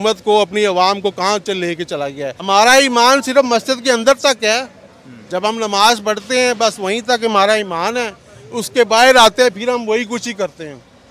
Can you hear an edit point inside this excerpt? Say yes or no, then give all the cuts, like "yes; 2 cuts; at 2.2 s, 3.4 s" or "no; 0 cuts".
yes; 1 cut; at 2.4 s